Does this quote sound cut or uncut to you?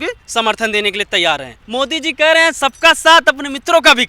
cut